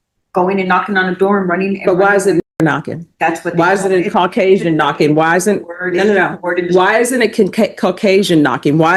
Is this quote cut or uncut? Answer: uncut